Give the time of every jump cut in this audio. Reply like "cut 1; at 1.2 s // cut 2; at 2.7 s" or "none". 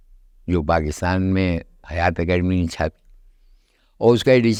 none